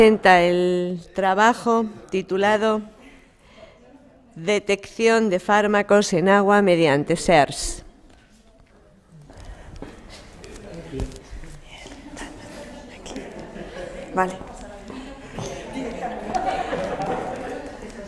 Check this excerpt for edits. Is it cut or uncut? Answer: uncut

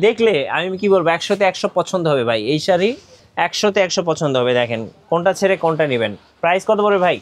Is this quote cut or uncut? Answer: uncut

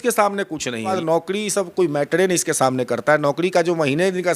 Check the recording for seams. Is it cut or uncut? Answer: cut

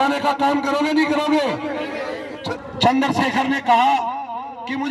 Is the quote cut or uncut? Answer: cut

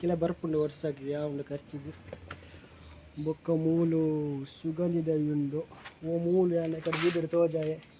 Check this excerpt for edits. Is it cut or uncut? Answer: uncut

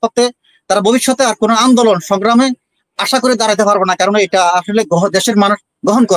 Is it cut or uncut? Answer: uncut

